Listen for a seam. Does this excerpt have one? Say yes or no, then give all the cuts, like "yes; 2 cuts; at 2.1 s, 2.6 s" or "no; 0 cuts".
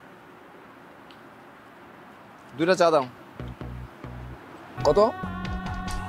yes; 1 cut; at 4.8 s